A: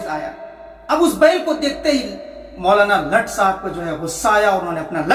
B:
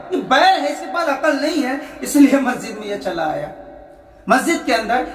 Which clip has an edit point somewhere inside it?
B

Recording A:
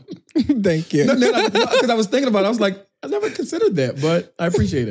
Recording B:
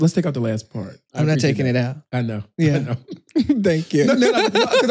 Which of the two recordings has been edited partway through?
B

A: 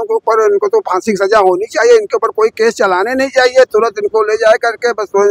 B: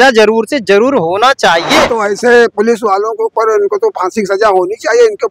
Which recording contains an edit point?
B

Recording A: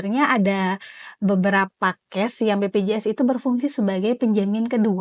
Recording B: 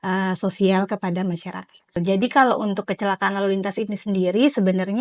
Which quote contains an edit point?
B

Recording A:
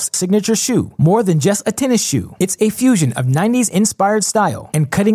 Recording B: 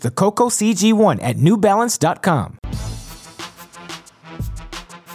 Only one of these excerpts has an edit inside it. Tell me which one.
B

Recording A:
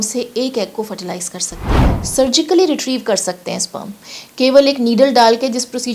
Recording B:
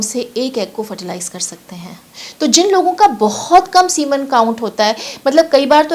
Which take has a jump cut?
A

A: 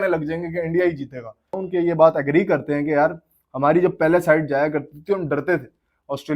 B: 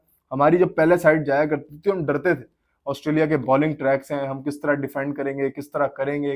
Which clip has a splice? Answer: A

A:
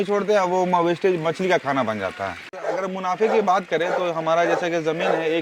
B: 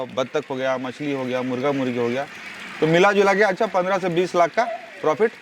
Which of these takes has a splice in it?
A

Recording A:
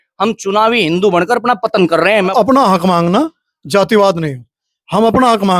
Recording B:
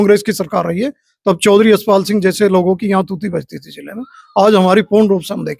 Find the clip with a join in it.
A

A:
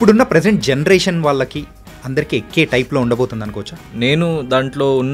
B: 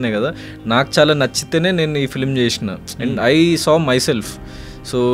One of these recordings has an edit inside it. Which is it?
A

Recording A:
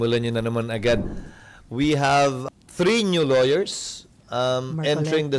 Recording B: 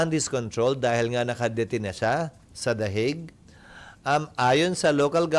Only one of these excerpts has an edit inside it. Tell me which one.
A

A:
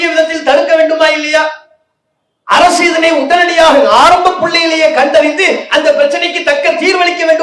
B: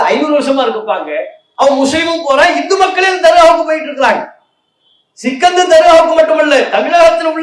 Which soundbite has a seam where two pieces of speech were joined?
B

